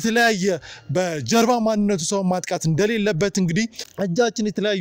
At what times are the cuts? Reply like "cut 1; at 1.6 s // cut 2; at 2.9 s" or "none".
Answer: cut 1; at 3.8 s